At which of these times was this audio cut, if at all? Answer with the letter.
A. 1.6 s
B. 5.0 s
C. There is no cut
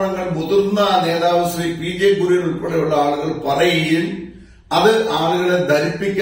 C